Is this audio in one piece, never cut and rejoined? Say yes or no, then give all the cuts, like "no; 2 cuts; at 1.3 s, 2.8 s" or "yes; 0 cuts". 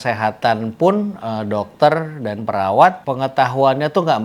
no; 1 cut; at 3.0 s